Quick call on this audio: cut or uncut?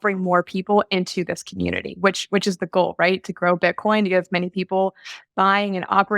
uncut